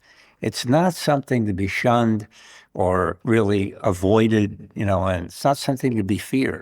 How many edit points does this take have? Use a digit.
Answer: 1